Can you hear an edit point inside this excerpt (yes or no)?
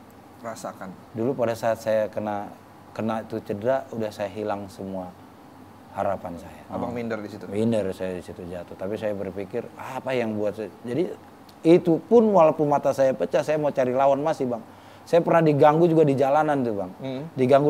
yes